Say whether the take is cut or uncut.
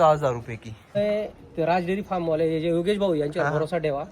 cut